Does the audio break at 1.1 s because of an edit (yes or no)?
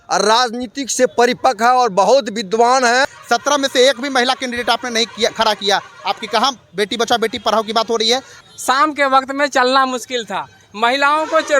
no